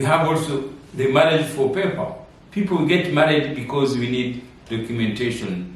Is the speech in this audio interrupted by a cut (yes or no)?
no